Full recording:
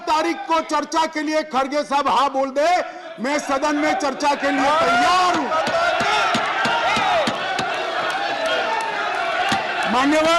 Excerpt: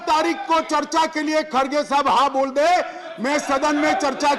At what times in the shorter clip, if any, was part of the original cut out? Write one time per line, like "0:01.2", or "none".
none